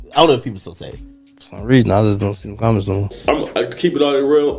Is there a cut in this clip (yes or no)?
yes